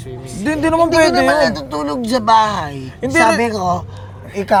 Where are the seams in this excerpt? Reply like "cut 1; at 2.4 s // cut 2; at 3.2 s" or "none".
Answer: none